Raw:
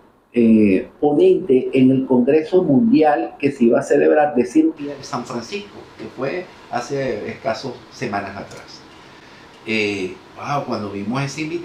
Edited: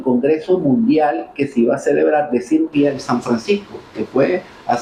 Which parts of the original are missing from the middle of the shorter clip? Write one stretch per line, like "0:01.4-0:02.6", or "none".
none